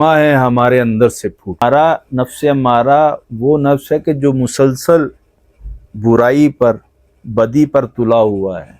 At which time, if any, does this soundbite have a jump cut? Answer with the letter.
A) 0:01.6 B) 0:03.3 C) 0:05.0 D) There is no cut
A